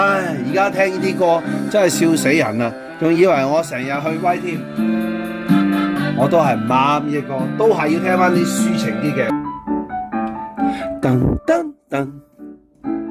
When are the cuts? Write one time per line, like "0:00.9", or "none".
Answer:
0:09.3

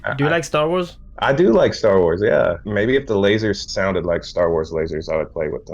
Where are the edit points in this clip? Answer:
0:01.0
0:02.7
0:03.6

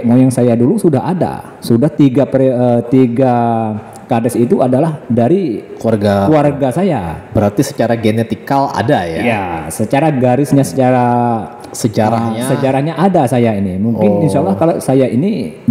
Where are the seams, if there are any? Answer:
none

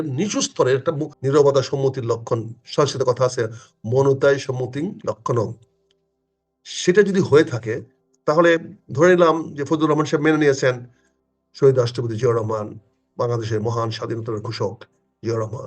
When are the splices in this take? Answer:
0:01.1

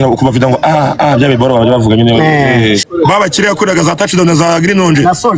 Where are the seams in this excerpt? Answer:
0:02.9

